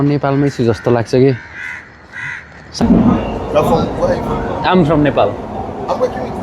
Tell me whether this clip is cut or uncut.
cut